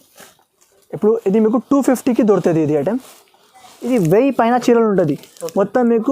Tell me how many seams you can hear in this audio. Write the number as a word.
one